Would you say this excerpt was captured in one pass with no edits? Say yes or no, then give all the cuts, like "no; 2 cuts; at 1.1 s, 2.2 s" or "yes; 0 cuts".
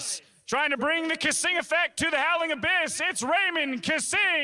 yes; 0 cuts